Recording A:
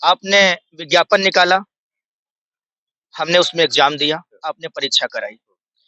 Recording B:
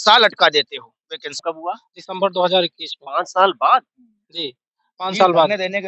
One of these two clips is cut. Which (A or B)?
B